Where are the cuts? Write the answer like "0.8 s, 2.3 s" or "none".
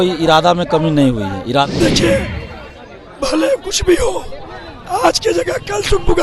1.7 s

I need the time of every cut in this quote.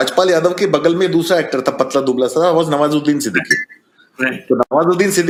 none

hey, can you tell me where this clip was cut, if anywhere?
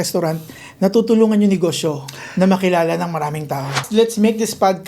3.8 s

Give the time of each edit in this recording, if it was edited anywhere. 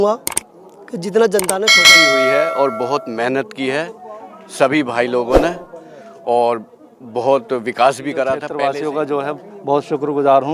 1.9 s, 8.5 s

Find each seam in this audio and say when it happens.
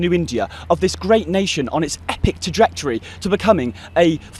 none

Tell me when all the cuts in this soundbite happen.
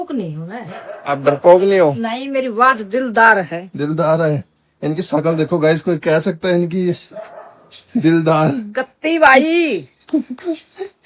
none

